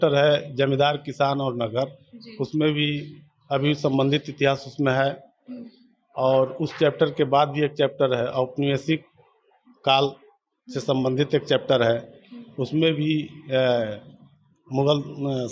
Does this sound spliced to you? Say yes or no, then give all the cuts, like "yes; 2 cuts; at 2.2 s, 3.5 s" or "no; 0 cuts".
no; 0 cuts